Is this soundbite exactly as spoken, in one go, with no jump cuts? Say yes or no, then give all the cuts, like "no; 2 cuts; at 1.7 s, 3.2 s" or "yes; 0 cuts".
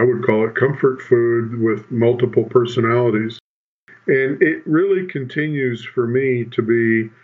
no; 1 cut; at 3.6 s